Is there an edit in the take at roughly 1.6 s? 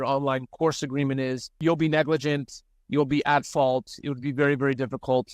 yes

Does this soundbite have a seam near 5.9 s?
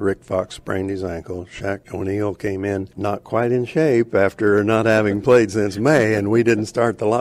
no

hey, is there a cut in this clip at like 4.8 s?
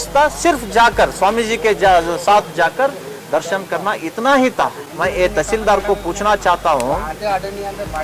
yes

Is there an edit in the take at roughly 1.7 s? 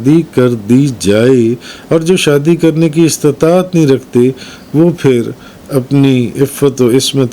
no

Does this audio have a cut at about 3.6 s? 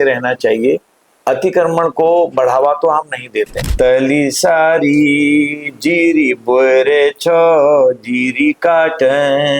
yes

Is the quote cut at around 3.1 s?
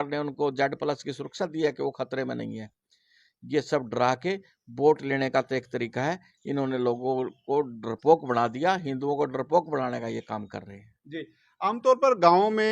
no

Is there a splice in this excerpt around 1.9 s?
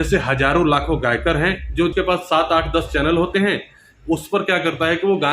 yes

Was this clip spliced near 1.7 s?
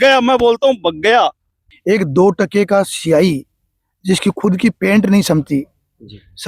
yes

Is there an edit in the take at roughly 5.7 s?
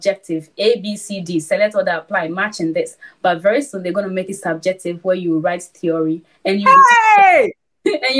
no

